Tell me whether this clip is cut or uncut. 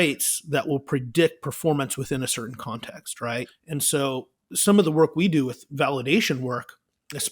cut